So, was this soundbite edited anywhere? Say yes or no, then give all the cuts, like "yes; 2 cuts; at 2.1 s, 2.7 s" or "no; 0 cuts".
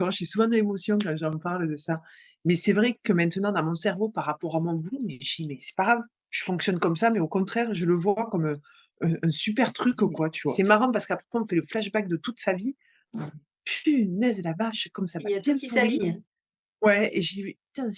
yes; 1 cut; at 10.5 s